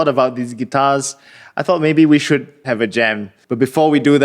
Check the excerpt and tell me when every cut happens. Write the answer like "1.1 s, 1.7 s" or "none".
3.4 s